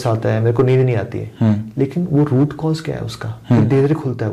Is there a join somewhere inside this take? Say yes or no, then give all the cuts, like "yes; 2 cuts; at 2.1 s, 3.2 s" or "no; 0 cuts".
no; 0 cuts